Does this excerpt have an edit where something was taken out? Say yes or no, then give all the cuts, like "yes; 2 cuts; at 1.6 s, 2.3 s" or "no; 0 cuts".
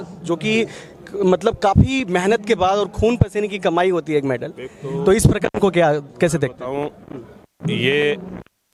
no; 0 cuts